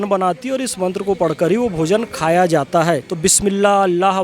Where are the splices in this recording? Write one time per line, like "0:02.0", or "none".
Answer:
0:03.1